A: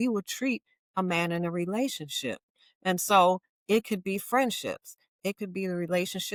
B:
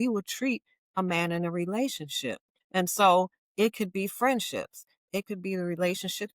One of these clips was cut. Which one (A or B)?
B